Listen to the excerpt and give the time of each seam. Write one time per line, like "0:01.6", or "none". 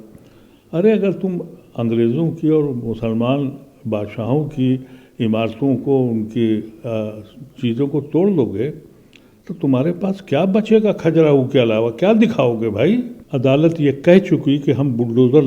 0:13.2